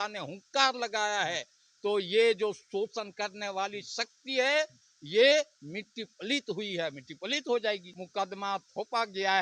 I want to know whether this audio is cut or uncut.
cut